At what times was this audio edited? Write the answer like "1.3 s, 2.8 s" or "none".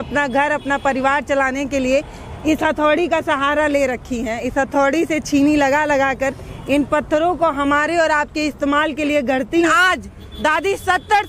9.7 s